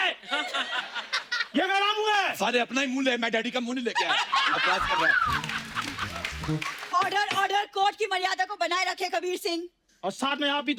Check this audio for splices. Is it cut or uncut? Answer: uncut